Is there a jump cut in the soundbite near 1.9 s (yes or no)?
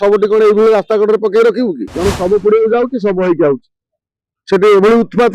yes